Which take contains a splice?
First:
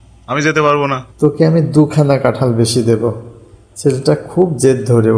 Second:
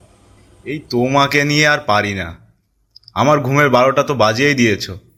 first; 1 cut; at 1.0 s

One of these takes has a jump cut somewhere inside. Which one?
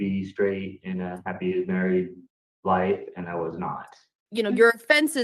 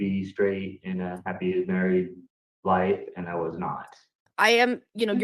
first; 1 cut; at 4.2 s

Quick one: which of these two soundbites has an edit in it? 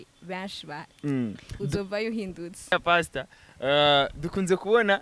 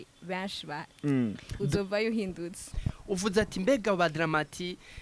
second; 1 cut; at 2.6 s

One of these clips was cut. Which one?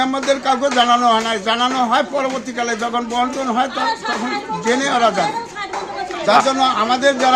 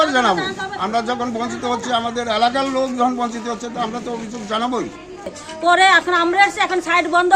second; 1 cut; at 5.3 s

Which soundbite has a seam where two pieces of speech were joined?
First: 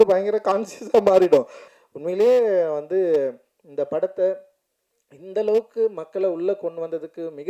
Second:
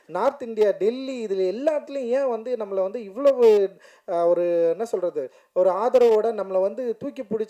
first; 1 cut; at 1.6 s

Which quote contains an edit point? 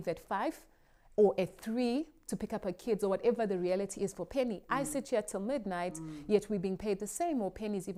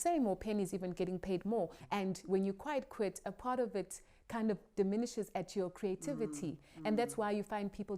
second; 1 cut; at 1.8 s

